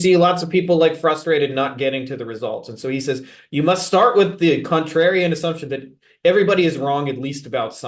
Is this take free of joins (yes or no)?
yes